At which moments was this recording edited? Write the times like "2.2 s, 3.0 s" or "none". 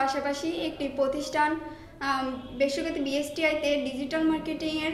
none